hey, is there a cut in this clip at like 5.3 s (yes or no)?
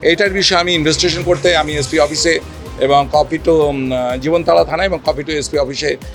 no